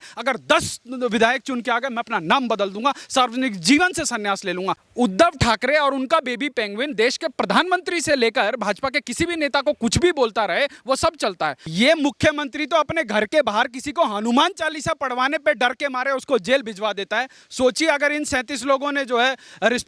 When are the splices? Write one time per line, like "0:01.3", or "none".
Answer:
0:04.8
0:11.6